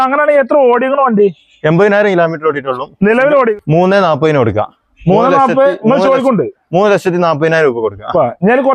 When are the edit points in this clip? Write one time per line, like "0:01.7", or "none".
0:03.5

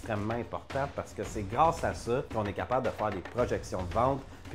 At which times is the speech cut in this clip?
0:02.3

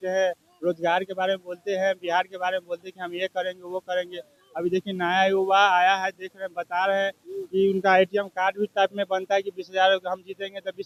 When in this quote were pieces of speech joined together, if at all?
none

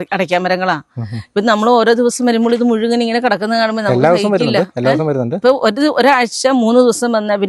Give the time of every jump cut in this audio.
0:05.4

